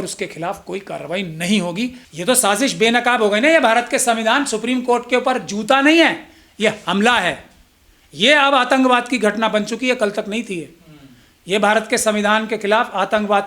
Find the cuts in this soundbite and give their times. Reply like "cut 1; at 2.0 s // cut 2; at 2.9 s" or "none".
cut 1; at 2.1 s